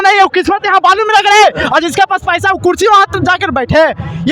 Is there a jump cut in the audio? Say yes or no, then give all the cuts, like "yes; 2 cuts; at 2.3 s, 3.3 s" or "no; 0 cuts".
no; 0 cuts